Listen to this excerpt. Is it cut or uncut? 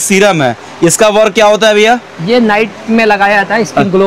uncut